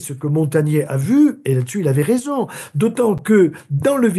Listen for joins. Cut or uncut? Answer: uncut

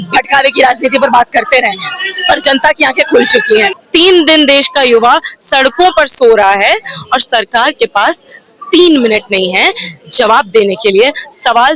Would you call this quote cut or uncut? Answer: cut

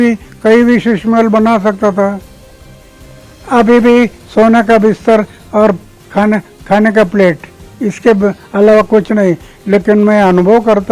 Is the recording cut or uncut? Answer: uncut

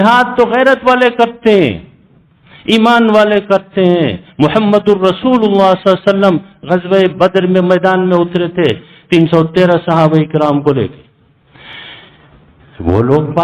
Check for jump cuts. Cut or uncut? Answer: uncut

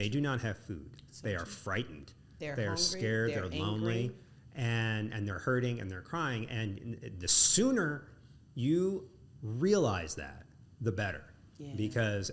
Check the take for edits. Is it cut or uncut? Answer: uncut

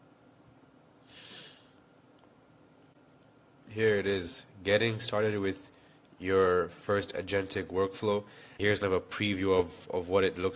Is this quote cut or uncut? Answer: cut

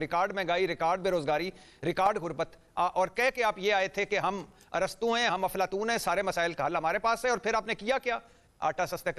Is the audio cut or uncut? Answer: uncut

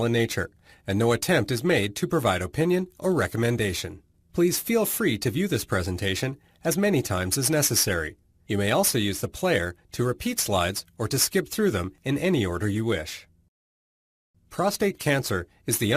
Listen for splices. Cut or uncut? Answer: cut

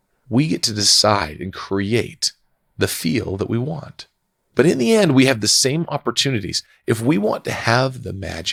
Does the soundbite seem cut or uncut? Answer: uncut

